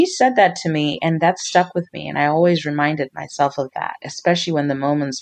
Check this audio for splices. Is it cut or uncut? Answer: uncut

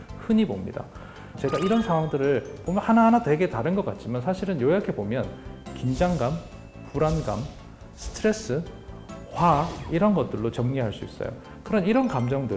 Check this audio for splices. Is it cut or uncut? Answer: cut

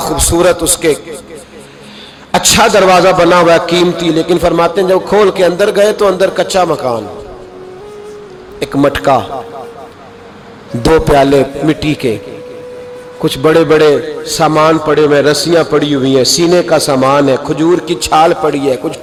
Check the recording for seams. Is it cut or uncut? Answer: uncut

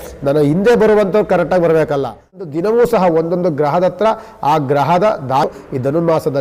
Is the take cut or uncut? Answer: cut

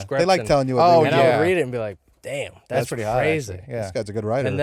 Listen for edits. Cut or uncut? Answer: uncut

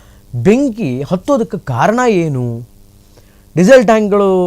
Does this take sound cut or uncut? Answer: uncut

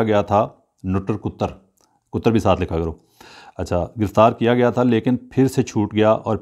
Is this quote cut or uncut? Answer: uncut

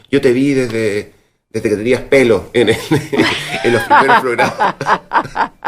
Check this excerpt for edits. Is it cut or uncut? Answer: uncut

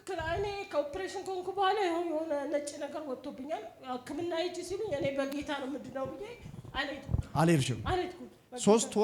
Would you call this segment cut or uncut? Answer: uncut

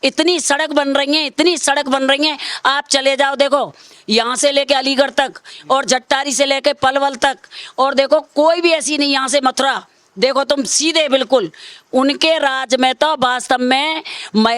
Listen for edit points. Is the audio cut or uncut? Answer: uncut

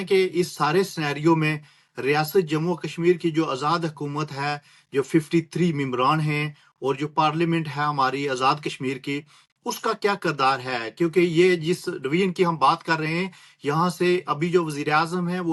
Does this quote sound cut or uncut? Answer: uncut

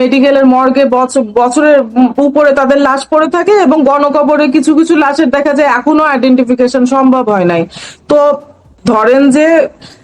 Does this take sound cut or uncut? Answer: cut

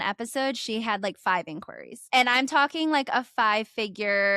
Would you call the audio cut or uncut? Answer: cut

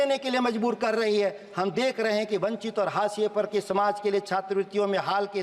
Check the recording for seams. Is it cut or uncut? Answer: uncut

